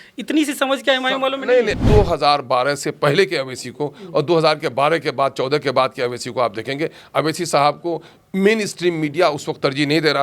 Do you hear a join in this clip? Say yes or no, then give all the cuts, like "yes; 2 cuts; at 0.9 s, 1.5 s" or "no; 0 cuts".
yes; 1 cut; at 1.8 s